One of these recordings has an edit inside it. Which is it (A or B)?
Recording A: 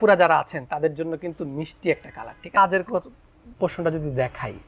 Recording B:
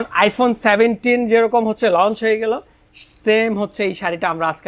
A